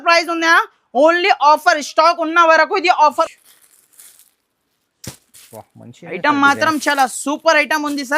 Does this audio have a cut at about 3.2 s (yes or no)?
yes